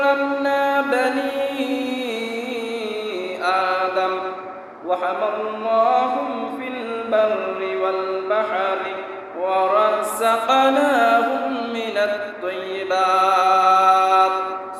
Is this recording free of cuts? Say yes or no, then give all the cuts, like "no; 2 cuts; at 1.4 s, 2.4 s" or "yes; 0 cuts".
yes; 0 cuts